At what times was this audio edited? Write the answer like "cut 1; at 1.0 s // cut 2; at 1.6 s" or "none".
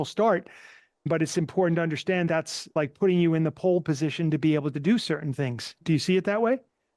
cut 1; at 1.1 s // cut 2; at 2.7 s // cut 3; at 5.8 s